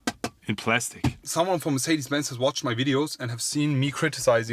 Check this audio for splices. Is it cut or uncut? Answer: cut